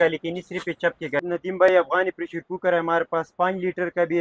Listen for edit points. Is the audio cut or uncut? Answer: cut